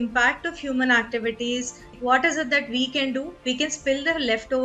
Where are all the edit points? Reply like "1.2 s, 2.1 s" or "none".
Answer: 2.0 s